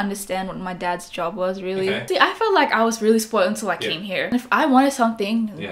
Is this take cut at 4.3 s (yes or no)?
yes